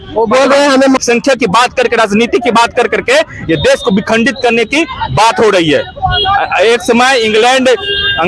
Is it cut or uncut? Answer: cut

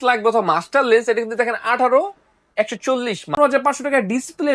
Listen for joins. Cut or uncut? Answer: cut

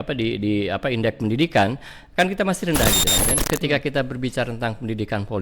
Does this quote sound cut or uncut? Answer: cut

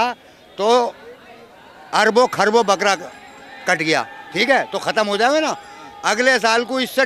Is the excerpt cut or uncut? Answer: uncut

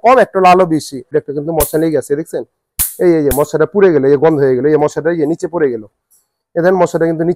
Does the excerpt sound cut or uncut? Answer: cut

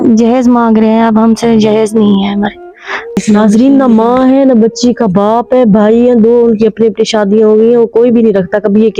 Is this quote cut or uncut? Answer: cut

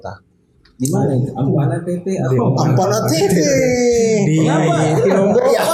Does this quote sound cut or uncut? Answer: uncut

